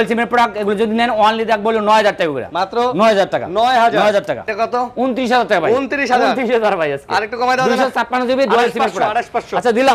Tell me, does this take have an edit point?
yes; 1 cut; at 4.5 s

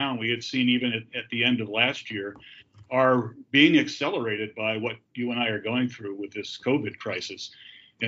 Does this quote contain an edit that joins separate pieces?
no; 0 cuts

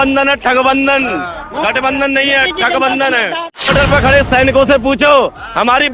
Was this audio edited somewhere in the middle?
yes; 1 cut; at 3.7 s

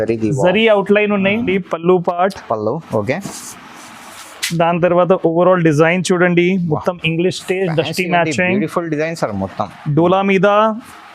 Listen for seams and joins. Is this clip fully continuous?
no; 1 cut; at 1.5 s

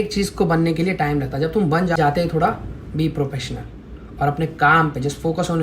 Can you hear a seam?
yes; 1 cut; at 2.0 s

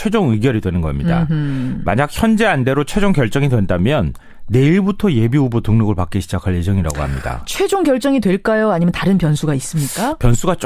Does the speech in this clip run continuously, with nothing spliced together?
no; 1 cut; at 4.4 s

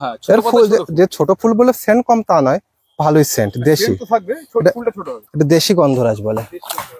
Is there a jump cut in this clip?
no; 0 cuts

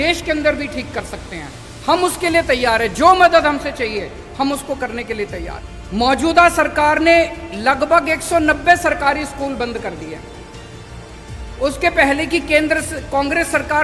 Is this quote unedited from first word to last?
yes; 0 cuts

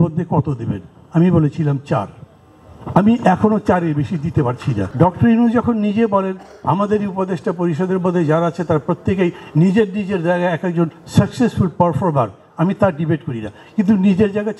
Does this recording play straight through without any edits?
no; 1 cut; at 4.8 s

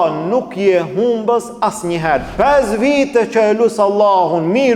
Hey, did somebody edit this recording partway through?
yes; 1 cut; at 2.3 s

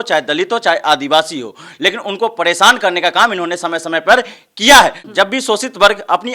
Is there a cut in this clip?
yes; 1 cut; at 5.0 s

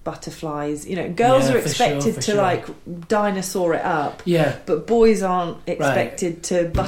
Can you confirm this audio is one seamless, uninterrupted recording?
yes; 0 cuts

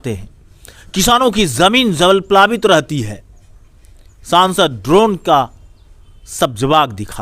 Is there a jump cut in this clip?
no; 0 cuts

